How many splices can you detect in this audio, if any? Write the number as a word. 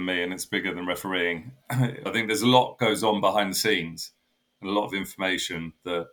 one